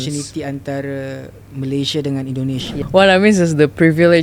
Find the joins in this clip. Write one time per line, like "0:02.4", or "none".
0:02.7